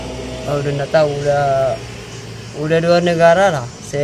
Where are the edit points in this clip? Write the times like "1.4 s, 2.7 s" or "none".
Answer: none